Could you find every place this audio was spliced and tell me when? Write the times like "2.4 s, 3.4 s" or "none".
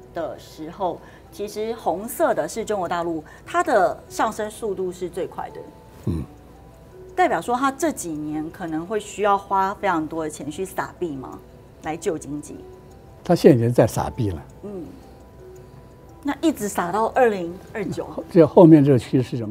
none